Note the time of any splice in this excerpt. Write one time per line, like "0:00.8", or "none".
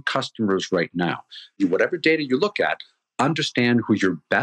0:01.6